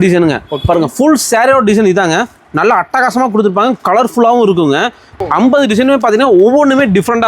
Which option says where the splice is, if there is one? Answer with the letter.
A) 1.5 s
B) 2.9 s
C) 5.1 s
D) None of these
C